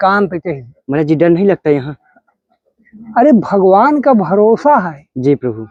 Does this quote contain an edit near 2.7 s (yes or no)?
no